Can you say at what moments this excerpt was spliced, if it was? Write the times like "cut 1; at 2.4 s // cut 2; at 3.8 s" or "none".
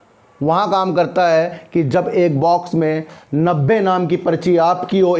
none